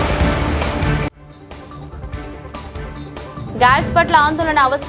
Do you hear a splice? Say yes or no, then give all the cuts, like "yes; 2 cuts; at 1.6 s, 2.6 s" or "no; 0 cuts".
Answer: no; 0 cuts